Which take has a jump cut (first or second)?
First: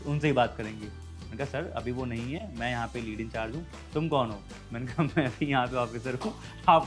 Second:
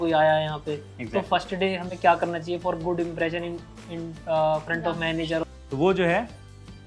second